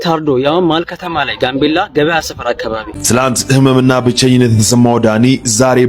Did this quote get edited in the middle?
yes; 1 cut; at 2.9 s

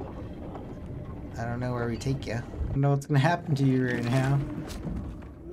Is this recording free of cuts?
no; 1 cut; at 2.7 s

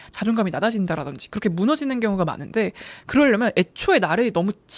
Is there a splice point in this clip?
no; 0 cuts

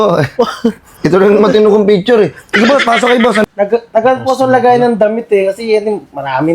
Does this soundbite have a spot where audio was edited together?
yes; 1 cut; at 3.4 s

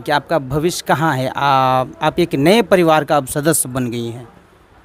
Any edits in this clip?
no; 0 cuts

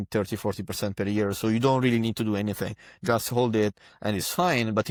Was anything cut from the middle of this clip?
no; 0 cuts

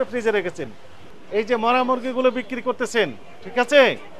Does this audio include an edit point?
yes; 1 cut; at 1.0 s

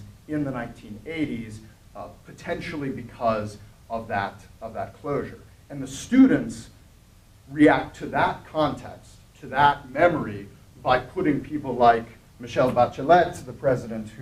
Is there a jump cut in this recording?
no; 0 cuts

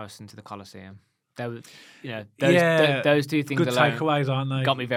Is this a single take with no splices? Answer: yes; 0 cuts

